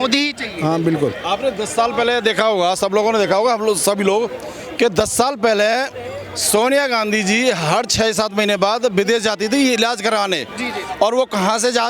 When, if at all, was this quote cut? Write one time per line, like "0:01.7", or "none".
none